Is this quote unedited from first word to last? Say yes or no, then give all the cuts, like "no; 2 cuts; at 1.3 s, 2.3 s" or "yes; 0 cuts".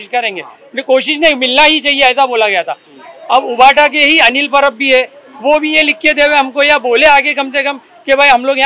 yes; 0 cuts